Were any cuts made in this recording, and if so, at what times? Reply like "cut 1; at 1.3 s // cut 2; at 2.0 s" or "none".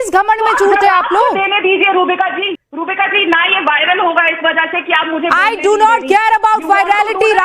cut 1; at 2.6 s